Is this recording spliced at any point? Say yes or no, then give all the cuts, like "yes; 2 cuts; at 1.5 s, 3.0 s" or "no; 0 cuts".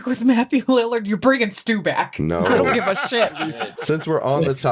yes; 1 cut; at 3.7 s